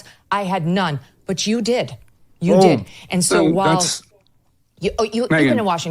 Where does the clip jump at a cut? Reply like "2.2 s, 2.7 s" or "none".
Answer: none

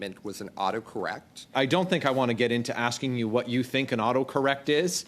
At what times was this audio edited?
1.5 s

